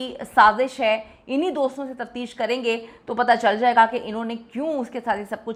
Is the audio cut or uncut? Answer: uncut